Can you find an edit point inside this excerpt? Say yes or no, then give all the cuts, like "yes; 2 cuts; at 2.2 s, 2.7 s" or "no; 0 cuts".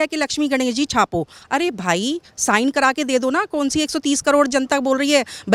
no; 0 cuts